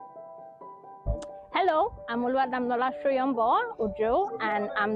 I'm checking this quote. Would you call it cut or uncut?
cut